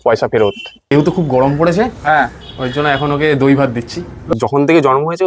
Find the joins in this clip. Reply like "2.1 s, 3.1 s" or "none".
0.9 s, 4.3 s